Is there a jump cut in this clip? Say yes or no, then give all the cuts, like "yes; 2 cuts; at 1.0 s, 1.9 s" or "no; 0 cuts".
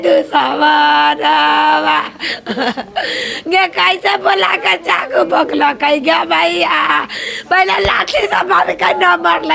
no; 0 cuts